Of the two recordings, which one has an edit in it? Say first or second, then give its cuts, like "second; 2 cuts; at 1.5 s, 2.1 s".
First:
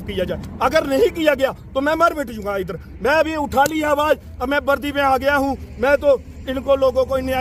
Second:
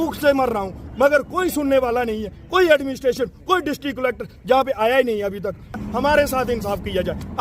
second; 1 cut; at 5.8 s